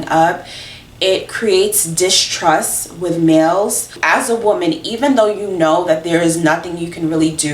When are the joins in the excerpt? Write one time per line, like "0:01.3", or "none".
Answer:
0:03.9